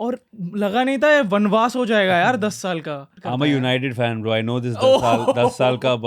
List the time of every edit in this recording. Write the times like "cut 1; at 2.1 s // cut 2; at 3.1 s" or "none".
cut 1; at 3.1 s